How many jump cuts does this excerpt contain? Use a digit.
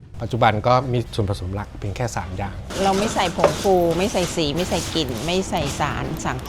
1